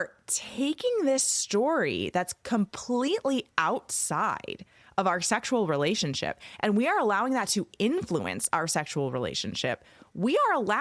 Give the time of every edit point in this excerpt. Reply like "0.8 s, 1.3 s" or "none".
none